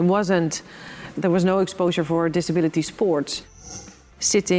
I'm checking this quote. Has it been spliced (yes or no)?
yes